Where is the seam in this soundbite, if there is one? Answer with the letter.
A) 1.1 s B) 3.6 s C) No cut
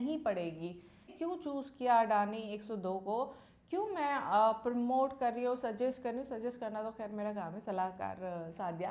A